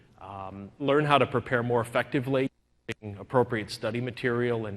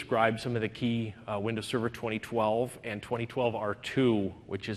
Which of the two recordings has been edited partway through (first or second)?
first